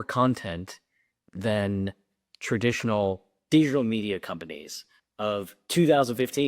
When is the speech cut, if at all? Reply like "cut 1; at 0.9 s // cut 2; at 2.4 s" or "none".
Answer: cut 1; at 5.6 s